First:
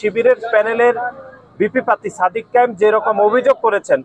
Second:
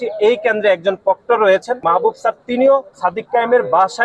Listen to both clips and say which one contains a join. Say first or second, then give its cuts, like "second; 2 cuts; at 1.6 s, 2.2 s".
second; 2 cuts; at 1.8 s, 2.9 s